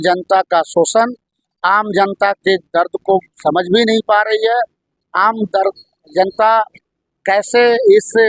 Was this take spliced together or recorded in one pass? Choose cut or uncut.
uncut